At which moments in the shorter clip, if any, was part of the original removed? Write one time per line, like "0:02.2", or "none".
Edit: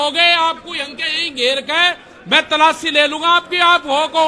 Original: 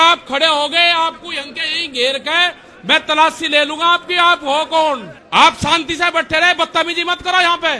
none

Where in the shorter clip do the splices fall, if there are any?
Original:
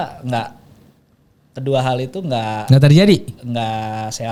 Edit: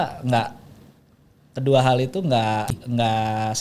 0:02.6

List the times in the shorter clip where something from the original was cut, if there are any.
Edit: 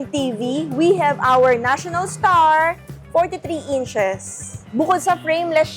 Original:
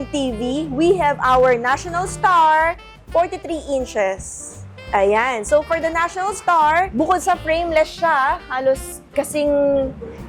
0:04.7

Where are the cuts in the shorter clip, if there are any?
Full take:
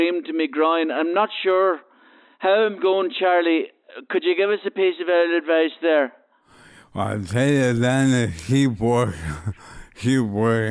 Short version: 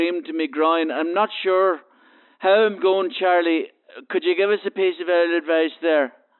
none

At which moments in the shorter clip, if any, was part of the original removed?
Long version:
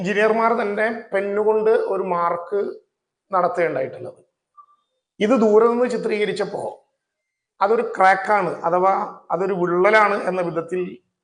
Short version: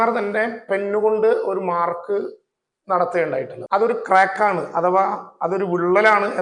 0:03.6

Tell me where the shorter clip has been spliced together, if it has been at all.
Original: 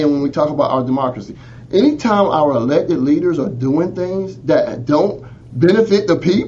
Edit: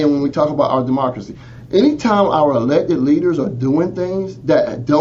none

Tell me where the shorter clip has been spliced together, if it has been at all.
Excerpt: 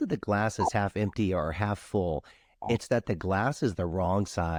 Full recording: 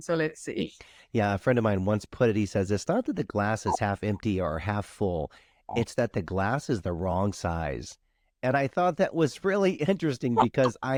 none

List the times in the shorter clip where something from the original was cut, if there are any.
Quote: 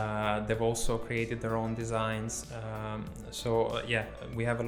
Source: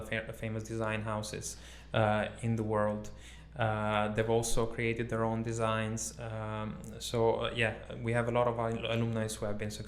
none

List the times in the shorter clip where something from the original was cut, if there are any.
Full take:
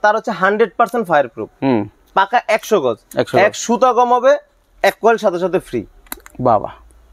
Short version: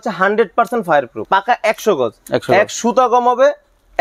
0:01.2

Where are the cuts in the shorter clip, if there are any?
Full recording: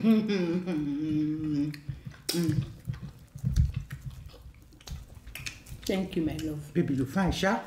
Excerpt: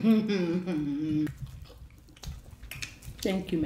0:01.3

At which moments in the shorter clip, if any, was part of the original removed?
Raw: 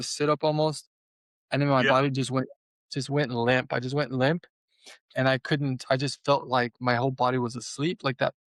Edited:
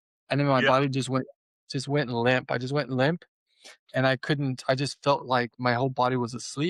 none

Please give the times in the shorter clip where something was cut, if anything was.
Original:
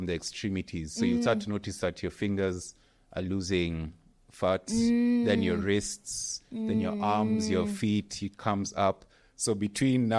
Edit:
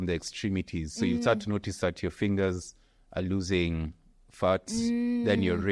none

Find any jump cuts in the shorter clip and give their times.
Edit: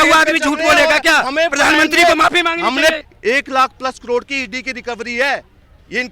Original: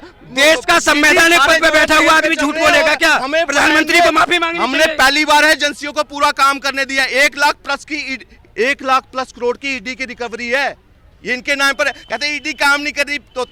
0:03.0

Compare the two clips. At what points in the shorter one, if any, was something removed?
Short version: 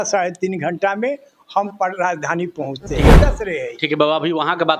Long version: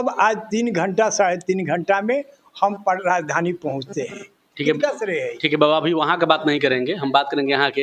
0:03.0

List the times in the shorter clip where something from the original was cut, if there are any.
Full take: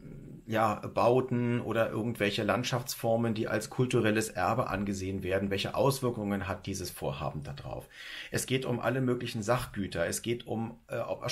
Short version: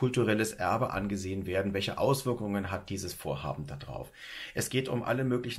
none

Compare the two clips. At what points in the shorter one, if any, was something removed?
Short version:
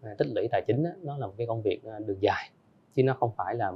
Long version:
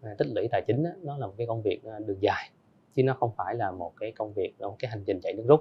none

